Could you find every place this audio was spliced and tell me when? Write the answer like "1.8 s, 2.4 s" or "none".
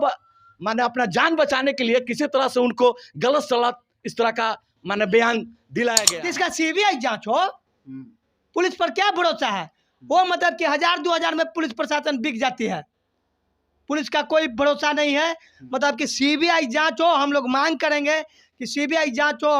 6.1 s